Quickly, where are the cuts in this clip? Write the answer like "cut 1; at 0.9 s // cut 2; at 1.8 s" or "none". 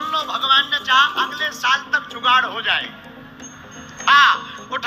none